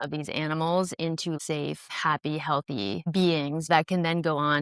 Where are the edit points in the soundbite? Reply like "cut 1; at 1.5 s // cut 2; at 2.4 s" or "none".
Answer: cut 1; at 1.4 s // cut 2; at 3.7 s